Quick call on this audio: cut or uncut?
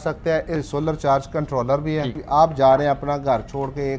cut